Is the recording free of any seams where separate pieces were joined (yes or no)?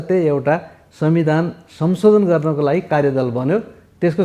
yes